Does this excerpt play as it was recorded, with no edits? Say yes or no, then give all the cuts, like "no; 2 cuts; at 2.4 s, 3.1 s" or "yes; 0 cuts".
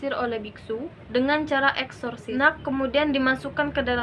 no; 2 cuts; at 0.9 s, 2.2 s